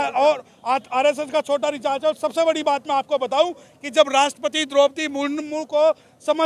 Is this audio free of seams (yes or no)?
yes